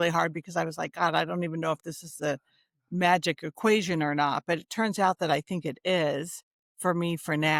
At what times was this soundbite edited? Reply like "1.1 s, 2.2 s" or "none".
none